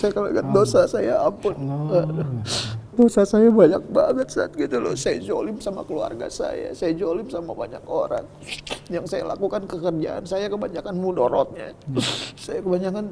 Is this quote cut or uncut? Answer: cut